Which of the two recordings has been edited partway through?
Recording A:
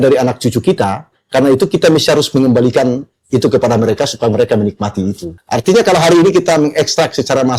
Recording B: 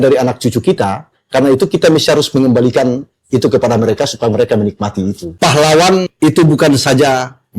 B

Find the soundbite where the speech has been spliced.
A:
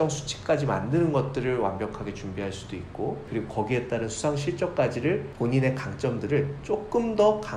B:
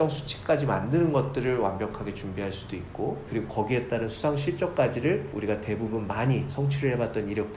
A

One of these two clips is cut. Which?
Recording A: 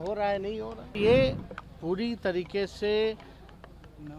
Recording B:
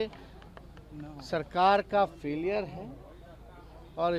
A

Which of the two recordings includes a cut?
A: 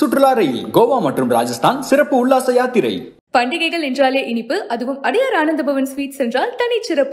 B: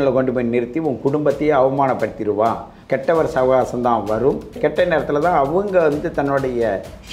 B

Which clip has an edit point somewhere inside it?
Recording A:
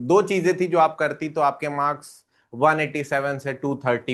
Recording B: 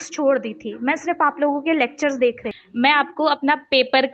B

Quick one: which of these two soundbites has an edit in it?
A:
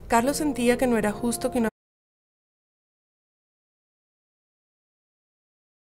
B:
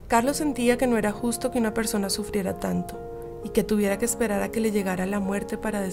B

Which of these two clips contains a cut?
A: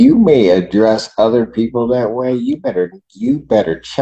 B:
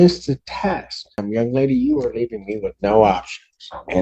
B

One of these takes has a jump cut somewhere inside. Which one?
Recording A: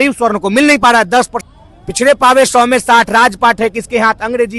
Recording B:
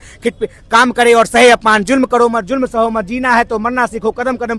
A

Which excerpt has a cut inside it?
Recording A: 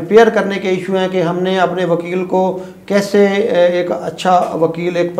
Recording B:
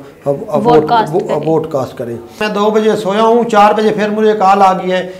B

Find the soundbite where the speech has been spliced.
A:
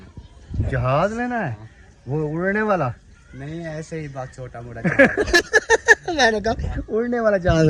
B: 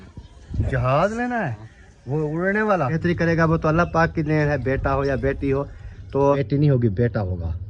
B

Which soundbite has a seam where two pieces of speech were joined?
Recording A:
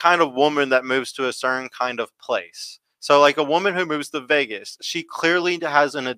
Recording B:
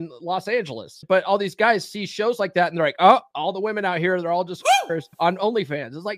B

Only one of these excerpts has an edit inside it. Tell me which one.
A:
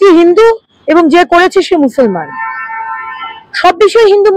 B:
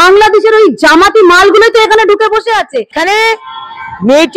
B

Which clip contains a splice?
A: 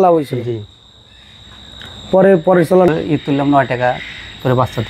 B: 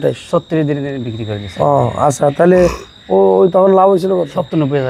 A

